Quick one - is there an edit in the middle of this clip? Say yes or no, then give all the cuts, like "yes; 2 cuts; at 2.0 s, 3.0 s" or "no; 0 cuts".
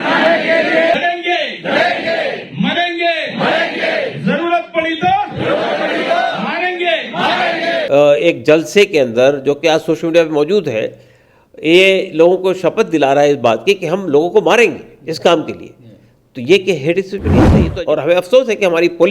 yes; 3 cuts; at 1.0 s, 7.9 s, 17.6 s